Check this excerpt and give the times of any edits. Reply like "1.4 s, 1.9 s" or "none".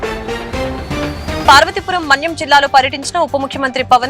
1.4 s

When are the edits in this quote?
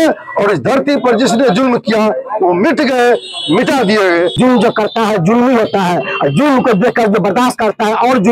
4.3 s

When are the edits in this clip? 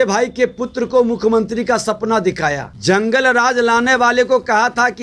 2.7 s

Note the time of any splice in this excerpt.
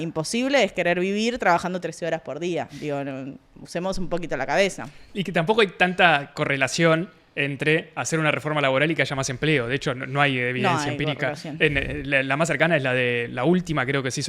none

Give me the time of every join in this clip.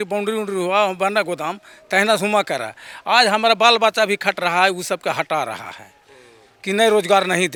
none

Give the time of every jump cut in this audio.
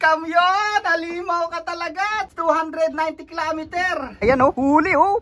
2.3 s, 4.1 s

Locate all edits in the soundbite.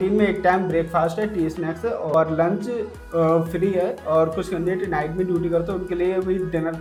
none

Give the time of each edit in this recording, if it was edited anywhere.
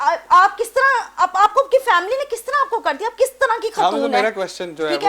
none

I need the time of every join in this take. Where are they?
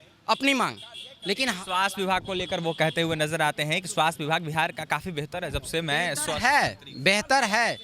none

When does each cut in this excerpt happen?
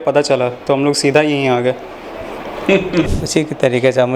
3.1 s

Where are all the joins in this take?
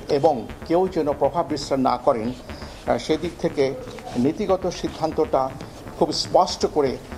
none

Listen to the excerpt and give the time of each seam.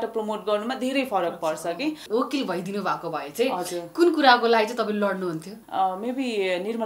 2.0 s, 5.5 s

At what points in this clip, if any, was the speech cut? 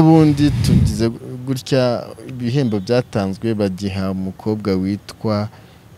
none

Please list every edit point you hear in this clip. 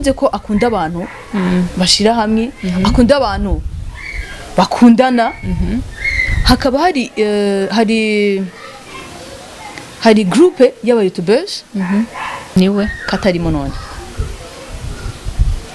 12.6 s

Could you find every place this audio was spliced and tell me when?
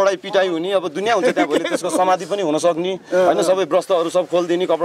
none

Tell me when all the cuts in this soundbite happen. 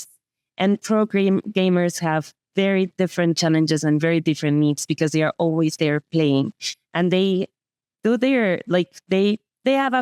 none

